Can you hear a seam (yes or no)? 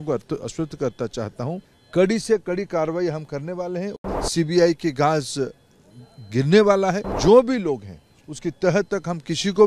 yes